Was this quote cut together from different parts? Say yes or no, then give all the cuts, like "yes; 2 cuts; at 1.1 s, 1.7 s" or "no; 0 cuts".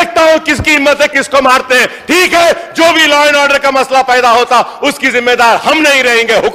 no; 0 cuts